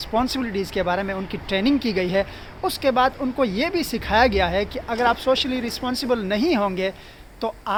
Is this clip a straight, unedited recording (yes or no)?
yes